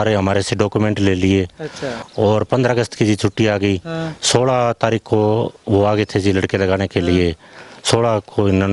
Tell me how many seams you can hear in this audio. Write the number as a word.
one